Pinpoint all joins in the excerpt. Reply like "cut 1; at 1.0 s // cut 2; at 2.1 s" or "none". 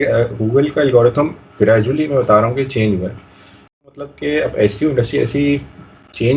cut 1; at 4.0 s